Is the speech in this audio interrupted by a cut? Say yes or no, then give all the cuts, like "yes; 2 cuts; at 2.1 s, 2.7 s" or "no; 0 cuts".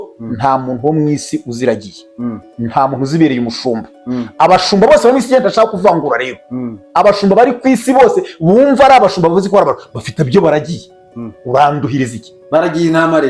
no; 0 cuts